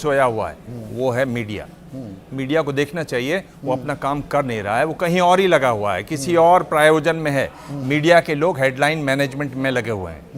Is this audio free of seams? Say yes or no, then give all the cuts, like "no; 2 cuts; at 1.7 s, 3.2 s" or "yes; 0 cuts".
yes; 0 cuts